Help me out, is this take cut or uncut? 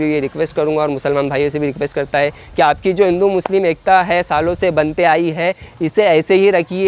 uncut